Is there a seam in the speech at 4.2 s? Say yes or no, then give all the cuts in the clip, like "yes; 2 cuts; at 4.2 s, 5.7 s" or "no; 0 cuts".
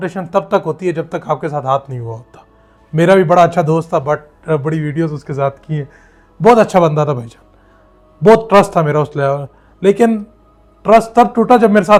no; 0 cuts